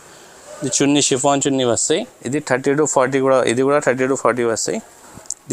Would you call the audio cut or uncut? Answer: cut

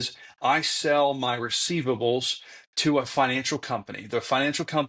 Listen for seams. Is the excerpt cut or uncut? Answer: uncut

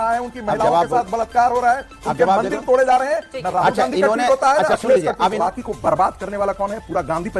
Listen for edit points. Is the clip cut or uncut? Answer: cut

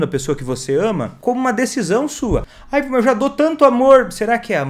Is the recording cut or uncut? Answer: cut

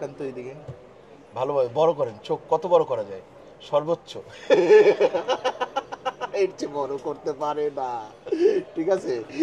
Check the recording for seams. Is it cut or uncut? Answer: uncut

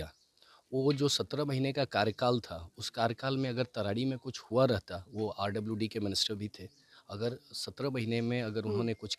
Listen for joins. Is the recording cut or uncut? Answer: uncut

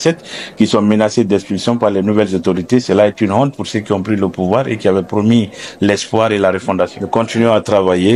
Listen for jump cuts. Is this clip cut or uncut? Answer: cut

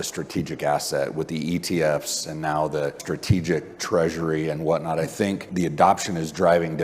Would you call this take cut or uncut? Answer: cut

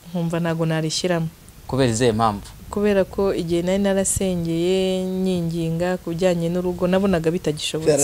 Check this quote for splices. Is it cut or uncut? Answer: uncut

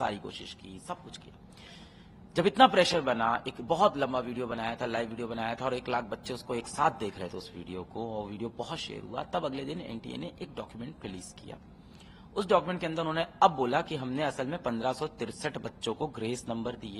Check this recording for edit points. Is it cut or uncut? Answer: uncut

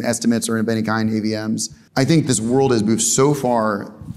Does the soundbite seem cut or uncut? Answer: cut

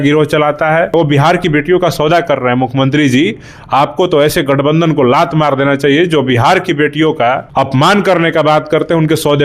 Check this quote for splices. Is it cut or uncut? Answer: cut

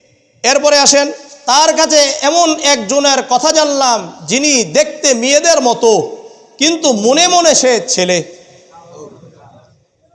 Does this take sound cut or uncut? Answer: uncut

